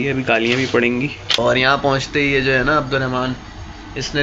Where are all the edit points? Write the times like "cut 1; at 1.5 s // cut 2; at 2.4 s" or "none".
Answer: cut 1; at 1.4 s

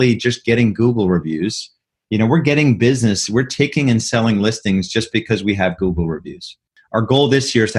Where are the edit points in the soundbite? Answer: cut 1; at 6.7 s

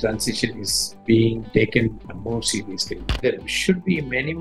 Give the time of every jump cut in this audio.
cut 1; at 3.1 s

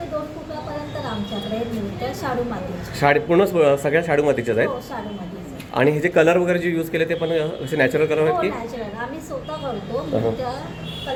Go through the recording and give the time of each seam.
none

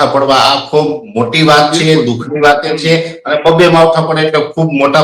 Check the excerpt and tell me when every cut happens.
none

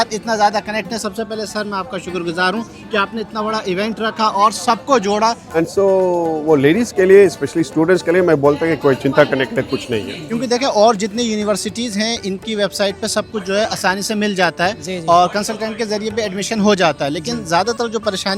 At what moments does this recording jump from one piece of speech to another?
cut 1; at 5.5 s // cut 2; at 10.2 s

